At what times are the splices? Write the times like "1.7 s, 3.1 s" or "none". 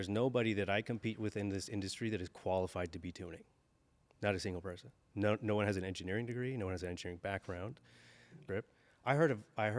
8.4 s